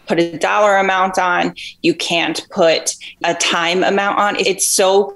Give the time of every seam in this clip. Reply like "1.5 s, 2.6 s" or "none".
3.0 s, 4.4 s